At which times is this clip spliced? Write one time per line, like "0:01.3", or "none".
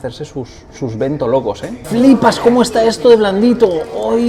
0:01.8